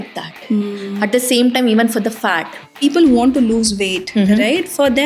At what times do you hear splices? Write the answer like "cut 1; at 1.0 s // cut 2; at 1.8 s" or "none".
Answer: cut 1; at 2.8 s